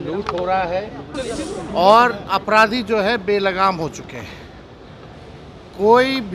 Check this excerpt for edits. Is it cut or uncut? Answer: cut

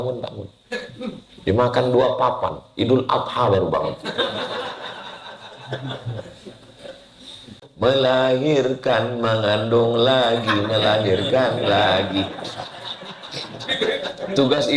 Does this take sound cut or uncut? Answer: cut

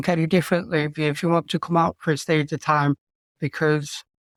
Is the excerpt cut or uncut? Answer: uncut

